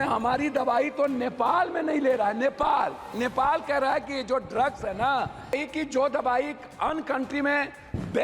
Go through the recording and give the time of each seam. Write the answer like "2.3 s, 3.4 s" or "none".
5.5 s